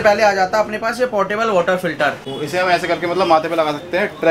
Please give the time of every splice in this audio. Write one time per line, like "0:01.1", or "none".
0:02.3